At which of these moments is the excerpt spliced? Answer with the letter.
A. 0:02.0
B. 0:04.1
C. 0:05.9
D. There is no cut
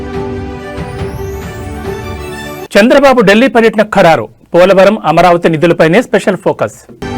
A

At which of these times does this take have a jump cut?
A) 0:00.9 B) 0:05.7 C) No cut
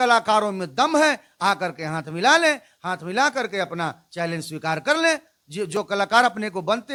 C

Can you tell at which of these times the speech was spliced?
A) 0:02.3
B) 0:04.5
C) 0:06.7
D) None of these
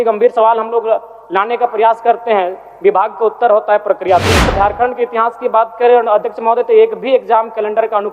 B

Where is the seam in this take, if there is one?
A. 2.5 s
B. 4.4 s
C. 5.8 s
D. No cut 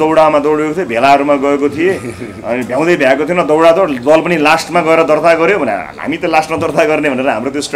D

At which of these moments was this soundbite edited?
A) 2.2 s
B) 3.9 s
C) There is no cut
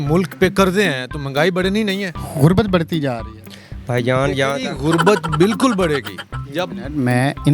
A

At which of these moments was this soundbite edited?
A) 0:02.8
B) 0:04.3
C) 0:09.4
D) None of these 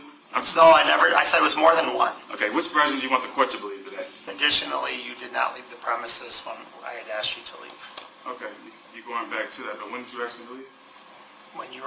B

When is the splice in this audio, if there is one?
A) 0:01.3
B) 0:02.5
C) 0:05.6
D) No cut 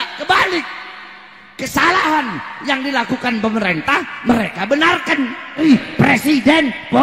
C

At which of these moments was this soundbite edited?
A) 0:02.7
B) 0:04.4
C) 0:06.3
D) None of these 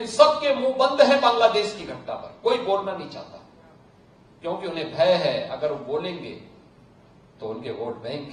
D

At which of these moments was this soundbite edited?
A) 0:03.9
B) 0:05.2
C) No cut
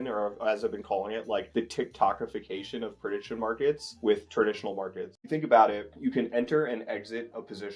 B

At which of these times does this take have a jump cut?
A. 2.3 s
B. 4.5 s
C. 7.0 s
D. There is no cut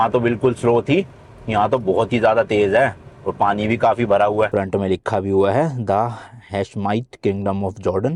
B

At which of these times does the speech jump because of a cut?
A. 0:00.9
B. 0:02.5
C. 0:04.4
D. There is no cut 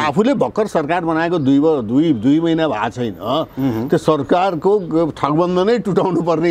D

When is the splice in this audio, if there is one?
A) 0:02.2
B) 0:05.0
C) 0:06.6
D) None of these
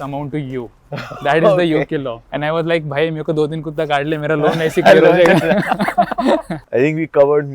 C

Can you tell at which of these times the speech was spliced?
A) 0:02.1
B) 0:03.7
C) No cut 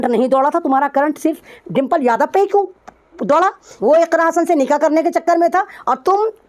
B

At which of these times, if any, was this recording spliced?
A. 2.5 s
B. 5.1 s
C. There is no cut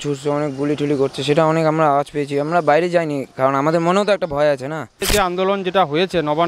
B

